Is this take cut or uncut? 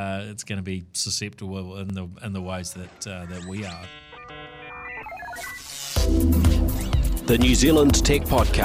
cut